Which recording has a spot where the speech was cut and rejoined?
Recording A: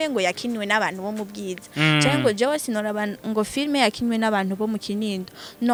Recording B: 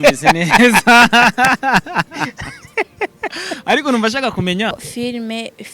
B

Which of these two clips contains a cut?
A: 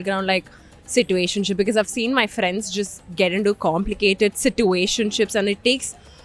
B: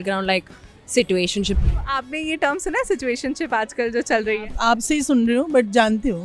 B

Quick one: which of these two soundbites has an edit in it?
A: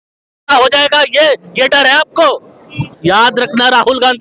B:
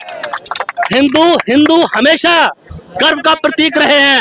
A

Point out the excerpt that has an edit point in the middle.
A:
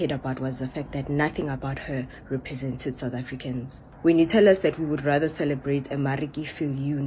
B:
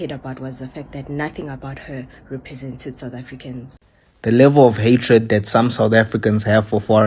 B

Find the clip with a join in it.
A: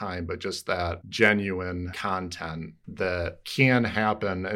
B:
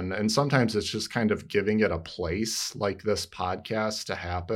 A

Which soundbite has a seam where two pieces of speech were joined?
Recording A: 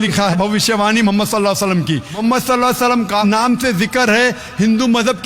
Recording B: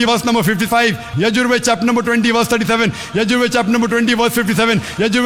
A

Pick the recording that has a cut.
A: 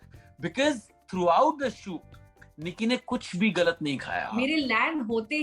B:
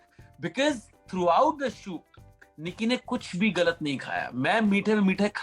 A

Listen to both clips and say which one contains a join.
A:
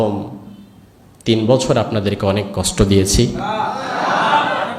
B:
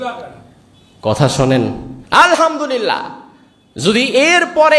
B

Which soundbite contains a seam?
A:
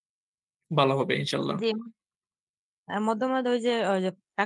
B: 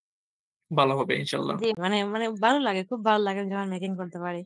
B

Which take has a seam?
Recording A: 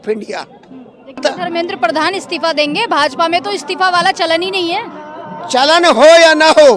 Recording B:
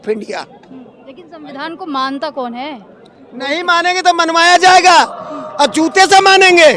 A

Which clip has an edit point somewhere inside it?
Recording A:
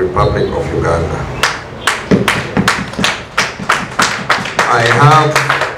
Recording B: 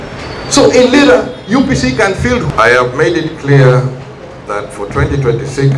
B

